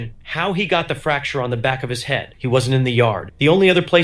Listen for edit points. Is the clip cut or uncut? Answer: cut